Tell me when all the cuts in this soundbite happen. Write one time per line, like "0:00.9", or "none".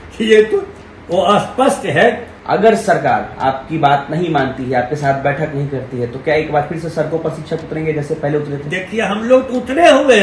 0:02.3